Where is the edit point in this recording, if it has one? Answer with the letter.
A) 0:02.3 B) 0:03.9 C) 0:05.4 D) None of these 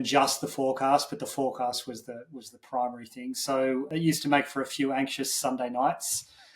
B